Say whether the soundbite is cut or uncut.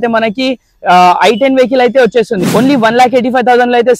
cut